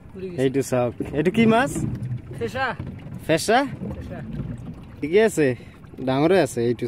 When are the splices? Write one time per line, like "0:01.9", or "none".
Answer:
0:05.0